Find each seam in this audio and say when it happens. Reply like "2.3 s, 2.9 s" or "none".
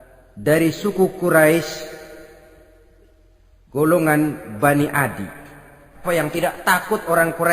6.0 s